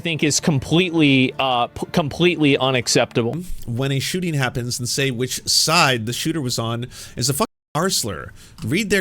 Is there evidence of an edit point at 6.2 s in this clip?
no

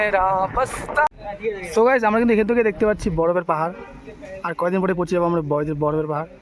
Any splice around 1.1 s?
yes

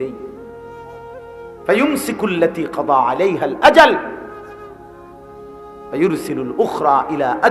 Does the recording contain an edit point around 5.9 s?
yes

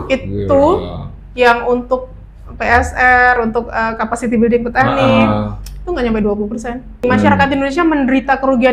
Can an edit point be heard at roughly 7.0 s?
yes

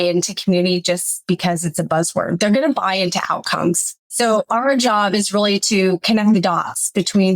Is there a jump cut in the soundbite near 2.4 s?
no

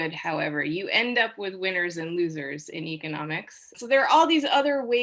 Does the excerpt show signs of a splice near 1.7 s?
no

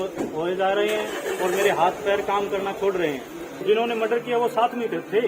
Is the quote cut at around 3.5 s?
yes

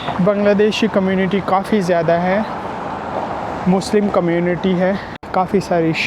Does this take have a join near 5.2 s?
yes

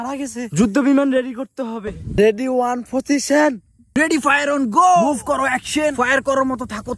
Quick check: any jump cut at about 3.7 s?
yes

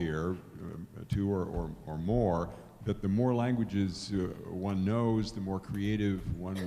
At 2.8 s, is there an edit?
no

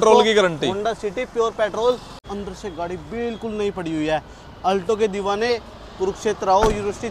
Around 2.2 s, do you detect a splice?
yes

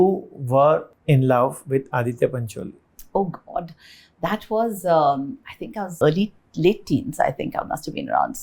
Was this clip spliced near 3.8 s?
no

